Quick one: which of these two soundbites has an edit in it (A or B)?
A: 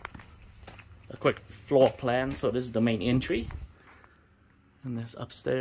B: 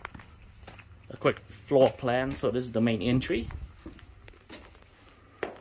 A